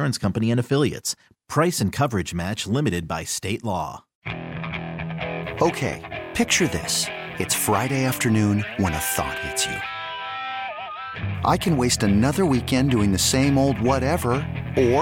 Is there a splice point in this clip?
yes; 1 cut; at 4.1 s

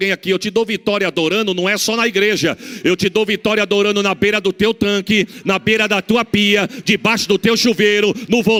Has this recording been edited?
no; 0 cuts

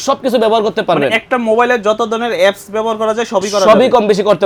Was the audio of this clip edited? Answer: no; 0 cuts

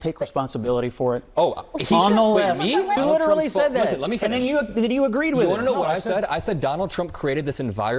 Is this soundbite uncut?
no; 1 cut; at 3.0 s

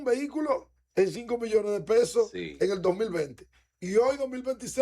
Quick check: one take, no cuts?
yes; 0 cuts

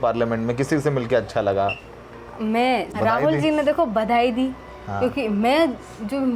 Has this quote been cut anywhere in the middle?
yes; 1 cut; at 2.9 s

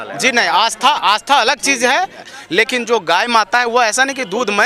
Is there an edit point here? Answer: yes; 1 cut; at 2.2 s

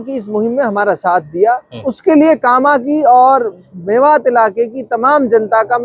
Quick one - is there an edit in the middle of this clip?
no; 0 cuts

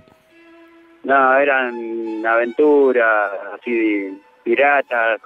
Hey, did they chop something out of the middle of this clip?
yes; 1 cut; at 3.2 s

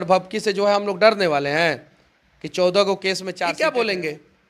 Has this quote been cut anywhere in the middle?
yes; 1 cut; at 3.4 s

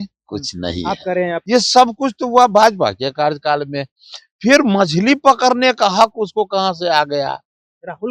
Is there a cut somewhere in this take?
yes; 1 cut; at 1.4 s

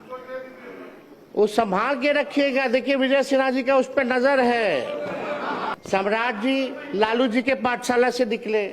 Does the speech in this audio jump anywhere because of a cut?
yes; 1 cut; at 5.8 s

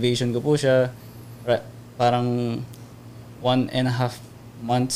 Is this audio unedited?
yes; 0 cuts

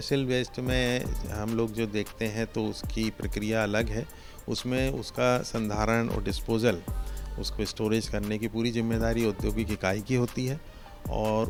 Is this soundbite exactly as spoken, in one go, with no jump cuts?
yes; 0 cuts

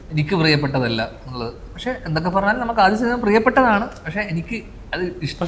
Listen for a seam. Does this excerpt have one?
no; 0 cuts

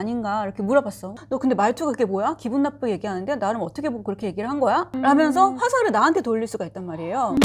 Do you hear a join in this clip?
yes; 1 cut; at 1.3 s

